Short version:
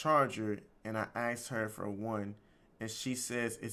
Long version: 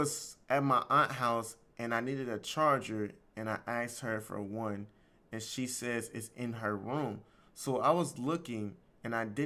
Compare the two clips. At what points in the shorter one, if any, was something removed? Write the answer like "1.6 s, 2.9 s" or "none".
none